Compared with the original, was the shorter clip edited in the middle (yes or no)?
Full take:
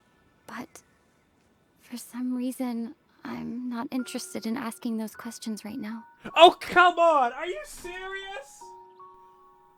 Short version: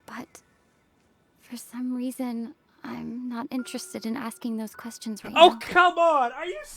yes